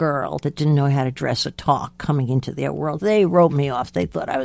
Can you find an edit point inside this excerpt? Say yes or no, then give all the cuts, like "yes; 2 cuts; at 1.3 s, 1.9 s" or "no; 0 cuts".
no; 0 cuts